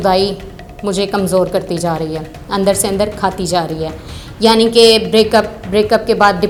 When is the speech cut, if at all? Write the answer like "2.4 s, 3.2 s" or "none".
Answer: none